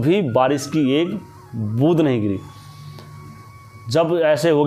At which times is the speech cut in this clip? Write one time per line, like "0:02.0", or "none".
none